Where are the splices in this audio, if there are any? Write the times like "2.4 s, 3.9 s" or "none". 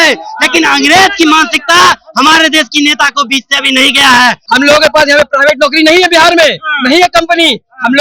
4.4 s